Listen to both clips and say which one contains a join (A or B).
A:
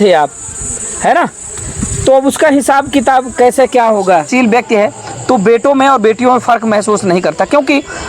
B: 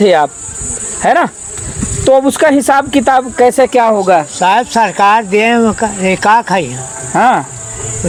A